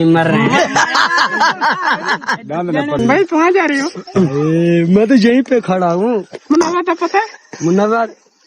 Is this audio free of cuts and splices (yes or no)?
no